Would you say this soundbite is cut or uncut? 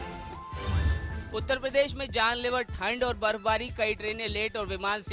cut